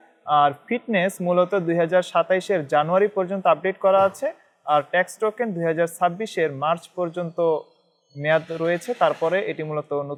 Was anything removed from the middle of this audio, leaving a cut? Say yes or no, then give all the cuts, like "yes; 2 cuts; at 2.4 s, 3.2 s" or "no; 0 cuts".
no; 0 cuts